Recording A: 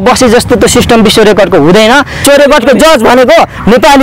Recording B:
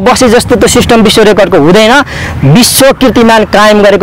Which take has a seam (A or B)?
A